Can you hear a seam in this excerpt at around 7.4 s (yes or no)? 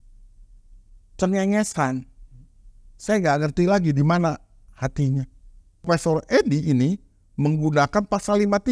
no